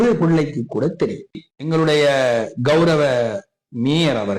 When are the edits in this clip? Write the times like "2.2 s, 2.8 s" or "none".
1.5 s